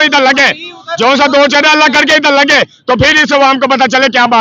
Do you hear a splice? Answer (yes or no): no